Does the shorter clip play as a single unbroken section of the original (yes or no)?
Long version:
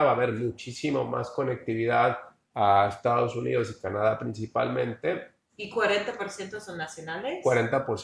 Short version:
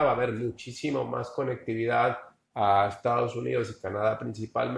yes